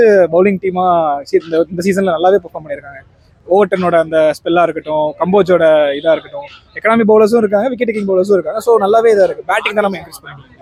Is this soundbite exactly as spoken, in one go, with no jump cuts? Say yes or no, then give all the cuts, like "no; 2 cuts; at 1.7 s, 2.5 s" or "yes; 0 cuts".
yes; 0 cuts